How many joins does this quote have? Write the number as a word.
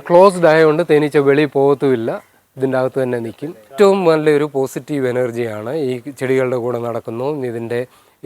one